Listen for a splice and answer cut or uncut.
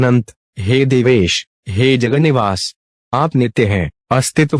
uncut